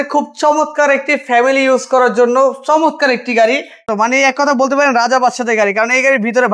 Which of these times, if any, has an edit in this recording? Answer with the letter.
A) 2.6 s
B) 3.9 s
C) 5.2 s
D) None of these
B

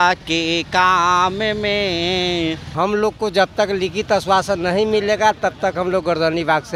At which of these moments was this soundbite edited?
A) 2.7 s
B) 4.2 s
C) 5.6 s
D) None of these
A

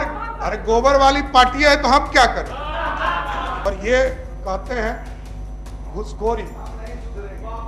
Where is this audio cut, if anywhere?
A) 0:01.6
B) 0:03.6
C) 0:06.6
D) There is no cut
B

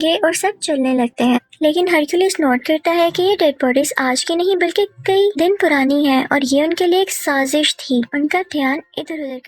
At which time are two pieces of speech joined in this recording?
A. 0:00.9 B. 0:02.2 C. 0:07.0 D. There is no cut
D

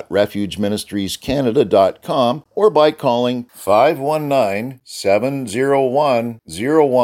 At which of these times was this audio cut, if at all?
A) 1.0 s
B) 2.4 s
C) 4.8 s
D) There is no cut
B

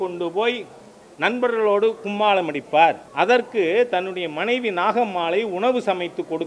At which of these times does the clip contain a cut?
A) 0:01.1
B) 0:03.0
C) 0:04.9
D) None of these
B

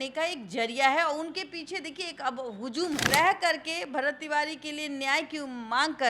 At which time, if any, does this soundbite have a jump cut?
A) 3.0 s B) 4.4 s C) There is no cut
A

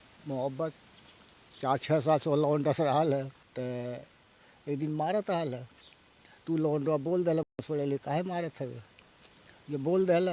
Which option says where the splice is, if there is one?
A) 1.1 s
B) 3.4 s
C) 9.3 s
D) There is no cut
B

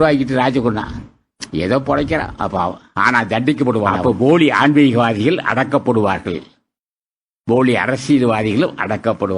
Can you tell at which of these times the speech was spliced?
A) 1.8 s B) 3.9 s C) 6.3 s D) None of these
B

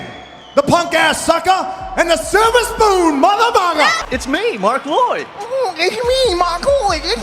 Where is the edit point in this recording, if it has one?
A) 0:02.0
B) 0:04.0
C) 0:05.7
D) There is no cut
B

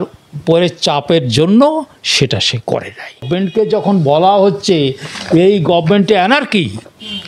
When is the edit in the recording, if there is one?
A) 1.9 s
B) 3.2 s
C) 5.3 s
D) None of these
B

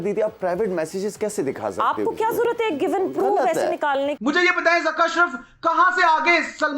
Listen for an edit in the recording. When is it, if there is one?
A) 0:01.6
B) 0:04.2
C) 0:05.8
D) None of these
B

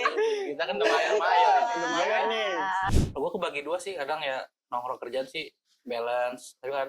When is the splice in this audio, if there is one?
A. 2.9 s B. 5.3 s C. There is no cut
A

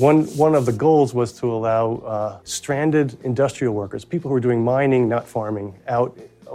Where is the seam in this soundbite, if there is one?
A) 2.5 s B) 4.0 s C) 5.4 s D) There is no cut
A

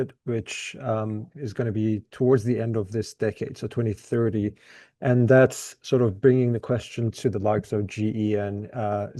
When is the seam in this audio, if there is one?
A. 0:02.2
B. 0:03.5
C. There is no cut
C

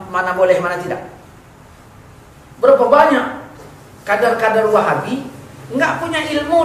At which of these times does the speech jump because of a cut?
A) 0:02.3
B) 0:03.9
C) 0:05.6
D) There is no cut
A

